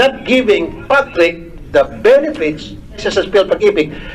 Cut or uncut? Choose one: cut